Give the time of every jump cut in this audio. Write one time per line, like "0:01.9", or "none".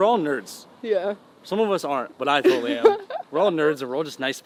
none